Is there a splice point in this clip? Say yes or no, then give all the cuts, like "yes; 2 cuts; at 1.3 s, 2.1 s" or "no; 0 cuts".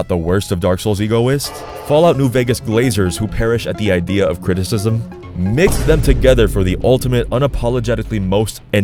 no; 0 cuts